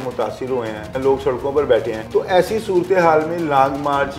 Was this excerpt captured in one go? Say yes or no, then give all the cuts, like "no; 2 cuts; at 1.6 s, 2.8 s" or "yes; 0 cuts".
no; 2 cuts; at 0.9 s, 2.0 s